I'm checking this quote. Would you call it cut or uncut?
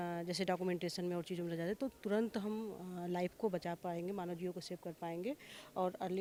uncut